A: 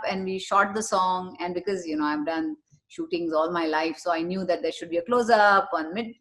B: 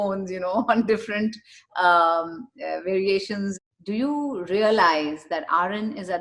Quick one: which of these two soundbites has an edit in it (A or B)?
B